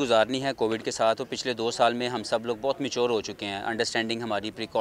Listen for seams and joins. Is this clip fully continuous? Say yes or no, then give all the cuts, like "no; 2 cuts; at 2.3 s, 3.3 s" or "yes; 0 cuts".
yes; 0 cuts